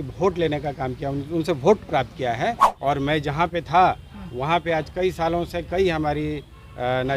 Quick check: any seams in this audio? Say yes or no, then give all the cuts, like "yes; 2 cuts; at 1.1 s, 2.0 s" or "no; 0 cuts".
yes; 1 cut; at 2.7 s